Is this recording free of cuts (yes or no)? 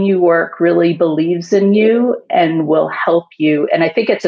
yes